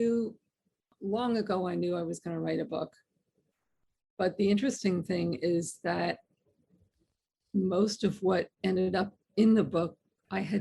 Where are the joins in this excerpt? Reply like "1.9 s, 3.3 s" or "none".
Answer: 0.9 s